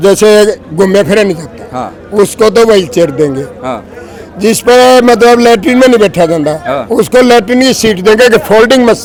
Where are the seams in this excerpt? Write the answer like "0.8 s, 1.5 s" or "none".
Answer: none

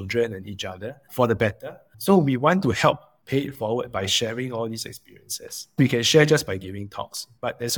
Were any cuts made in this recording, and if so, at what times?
1.9 s, 5.8 s

